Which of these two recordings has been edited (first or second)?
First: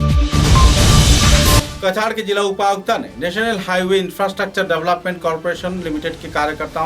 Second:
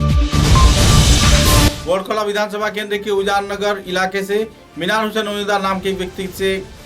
first